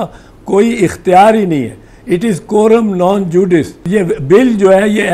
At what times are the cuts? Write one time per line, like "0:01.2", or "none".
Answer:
0:03.8